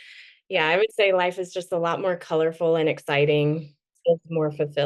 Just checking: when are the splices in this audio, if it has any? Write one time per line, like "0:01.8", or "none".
0:03.9